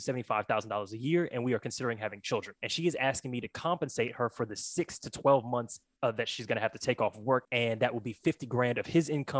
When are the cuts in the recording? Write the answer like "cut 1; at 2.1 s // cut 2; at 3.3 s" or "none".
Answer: cut 1; at 2.6 s // cut 2; at 7.5 s